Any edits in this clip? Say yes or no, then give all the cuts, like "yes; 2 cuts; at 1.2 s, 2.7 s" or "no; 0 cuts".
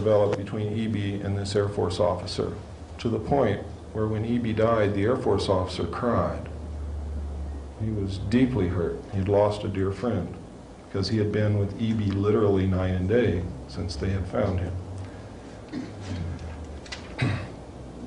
yes; 1 cut; at 14.0 s